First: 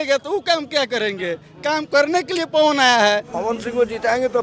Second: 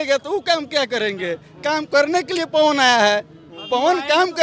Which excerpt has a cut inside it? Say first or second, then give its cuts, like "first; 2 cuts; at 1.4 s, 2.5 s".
first; 1 cut; at 3.3 s